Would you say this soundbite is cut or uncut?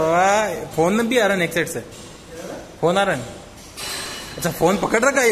uncut